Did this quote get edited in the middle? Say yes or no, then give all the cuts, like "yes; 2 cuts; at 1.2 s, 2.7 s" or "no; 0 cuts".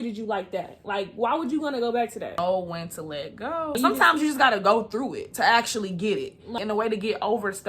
yes; 2 cuts; at 2.2 s, 6.5 s